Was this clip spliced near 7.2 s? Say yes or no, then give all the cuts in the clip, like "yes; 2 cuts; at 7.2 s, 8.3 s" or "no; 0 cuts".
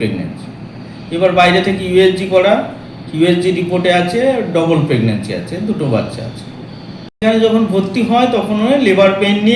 yes; 1 cut; at 7.2 s